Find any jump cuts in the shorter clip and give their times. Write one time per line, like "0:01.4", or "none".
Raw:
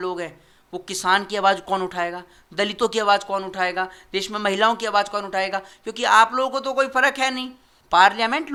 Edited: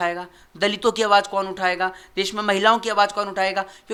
none